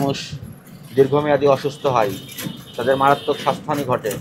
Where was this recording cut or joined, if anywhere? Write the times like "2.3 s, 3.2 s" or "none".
none